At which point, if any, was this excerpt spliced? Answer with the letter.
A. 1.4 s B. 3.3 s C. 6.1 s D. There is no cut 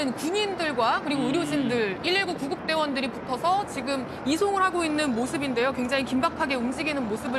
C